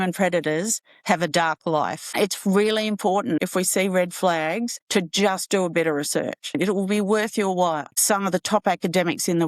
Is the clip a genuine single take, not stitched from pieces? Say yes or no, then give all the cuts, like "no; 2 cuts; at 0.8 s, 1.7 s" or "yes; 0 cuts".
no; 4 cuts; at 2.0 s, 3.4 s, 6.5 s, 7.9 s